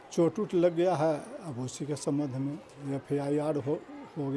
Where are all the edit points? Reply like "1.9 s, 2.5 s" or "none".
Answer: none